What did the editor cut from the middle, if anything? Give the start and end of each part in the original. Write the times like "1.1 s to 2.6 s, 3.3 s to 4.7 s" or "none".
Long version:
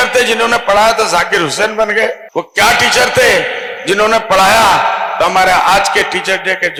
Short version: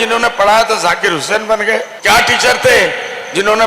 2.3 s to 2.5 s

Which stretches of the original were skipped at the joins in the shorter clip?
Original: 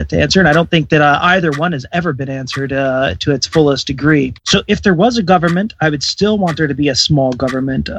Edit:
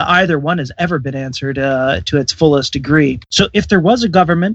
none

